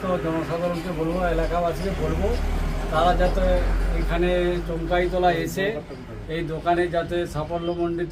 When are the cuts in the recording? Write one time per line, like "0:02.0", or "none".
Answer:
none